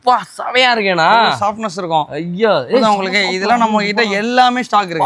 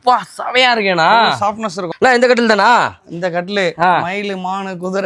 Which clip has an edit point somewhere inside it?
second; 1 cut; at 1.9 s

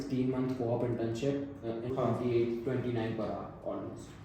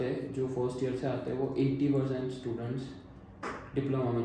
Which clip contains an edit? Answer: first; 1 cut; at 1.8 s

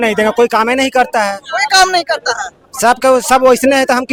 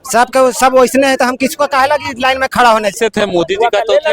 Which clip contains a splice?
second; 1 cut; at 2.9 s

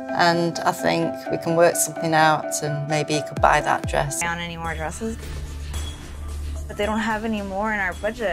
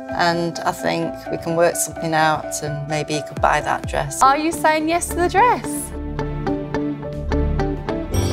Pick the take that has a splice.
first; 1 cut; at 4.1 s

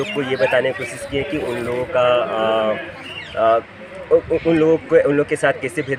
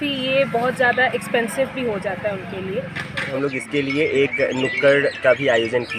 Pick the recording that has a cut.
second; 1 cut; at 3.3 s

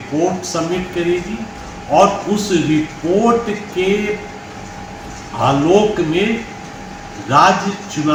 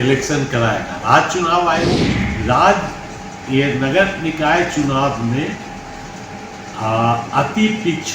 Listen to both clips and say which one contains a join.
second; 1 cut; at 1.9 s

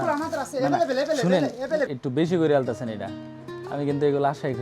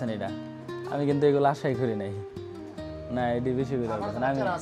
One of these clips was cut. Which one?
first; 1 cut; at 1.9 s

